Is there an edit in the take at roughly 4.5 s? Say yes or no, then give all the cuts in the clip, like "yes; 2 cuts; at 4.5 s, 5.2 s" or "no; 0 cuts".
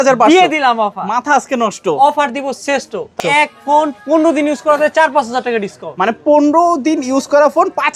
no; 1 cut; at 3.2 s